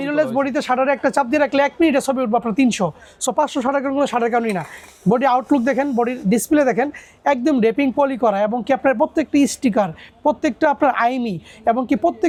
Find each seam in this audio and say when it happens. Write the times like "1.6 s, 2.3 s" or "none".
none